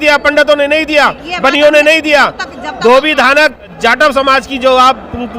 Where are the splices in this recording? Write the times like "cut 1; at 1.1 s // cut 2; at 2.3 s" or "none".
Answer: cut 1; at 3.7 s